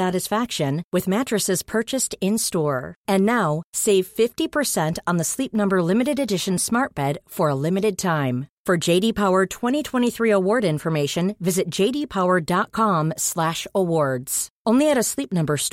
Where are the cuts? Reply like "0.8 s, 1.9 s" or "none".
none

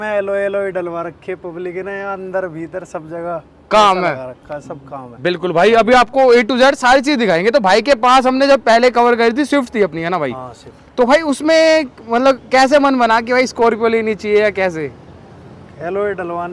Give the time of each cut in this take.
none

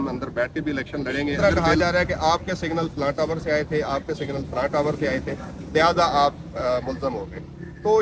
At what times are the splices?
1.4 s

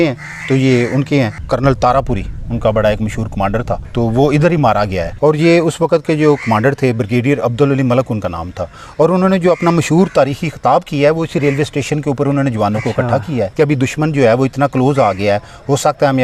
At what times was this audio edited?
1.4 s, 3.9 s, 5.1 s, 13.5 s

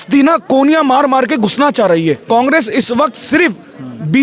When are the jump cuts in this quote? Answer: 2.2 s

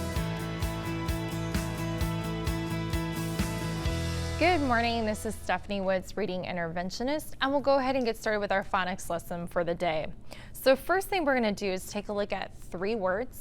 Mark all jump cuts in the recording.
4.4 s

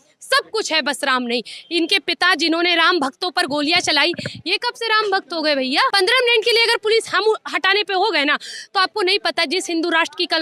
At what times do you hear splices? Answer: 5.9 s

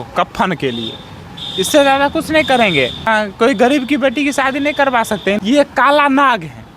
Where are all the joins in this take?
3.1 s, 5.2 s

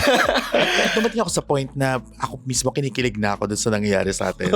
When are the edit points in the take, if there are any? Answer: 0.9 s

